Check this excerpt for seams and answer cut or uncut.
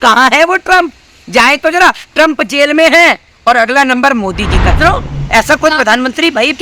cut